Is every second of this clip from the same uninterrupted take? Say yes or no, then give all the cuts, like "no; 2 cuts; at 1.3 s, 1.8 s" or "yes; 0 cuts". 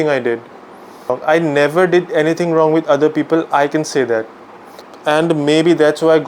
yes; 0 cuts